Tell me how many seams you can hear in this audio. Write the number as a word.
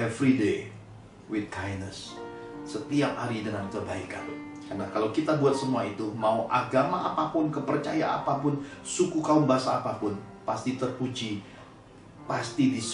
zero